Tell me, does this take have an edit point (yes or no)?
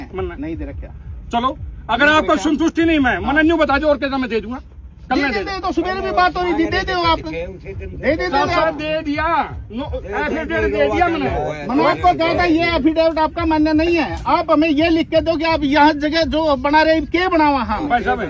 no